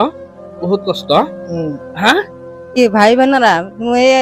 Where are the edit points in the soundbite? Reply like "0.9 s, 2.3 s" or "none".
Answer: 2.8 s